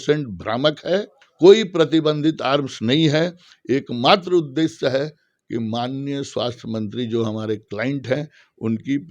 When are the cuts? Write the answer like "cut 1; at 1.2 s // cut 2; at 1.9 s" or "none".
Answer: cut 1; at 1.2 s